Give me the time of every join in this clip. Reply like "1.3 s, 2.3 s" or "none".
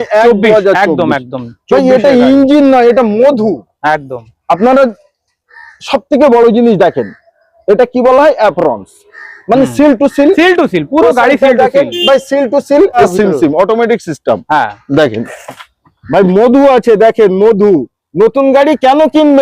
13.0 s